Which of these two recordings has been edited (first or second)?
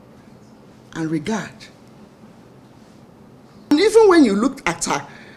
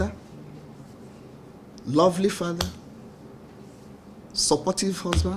first